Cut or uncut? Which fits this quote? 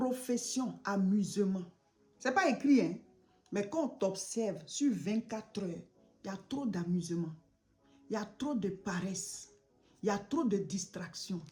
uncut